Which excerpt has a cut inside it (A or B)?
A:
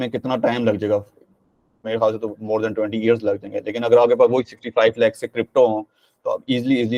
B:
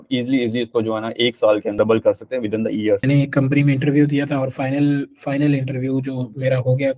B